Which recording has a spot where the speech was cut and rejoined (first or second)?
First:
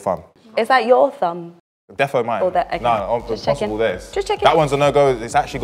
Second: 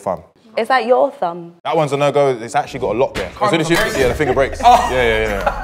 second